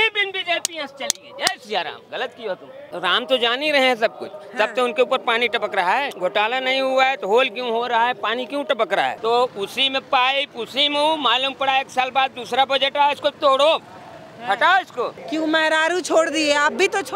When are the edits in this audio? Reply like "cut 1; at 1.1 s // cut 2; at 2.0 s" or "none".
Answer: cut 1; at 2.8 s // cut 2; at 6.1 s // cut 3; at 9.2 s // cut 4; at 15.2 s